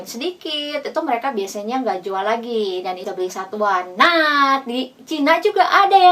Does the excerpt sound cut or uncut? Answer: cut